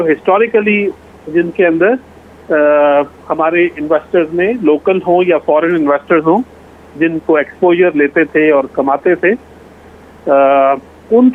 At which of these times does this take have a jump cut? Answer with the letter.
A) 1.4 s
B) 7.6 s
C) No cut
C